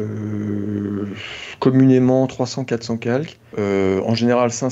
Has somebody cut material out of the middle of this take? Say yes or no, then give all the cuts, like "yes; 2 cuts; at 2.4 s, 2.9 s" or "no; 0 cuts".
yes; 1 cut; at 3.4 s